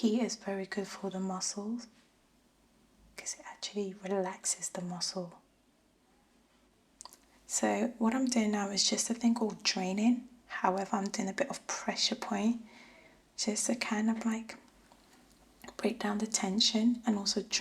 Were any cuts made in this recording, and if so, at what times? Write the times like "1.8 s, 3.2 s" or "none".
6.8 s